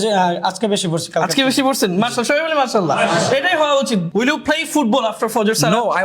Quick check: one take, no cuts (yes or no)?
no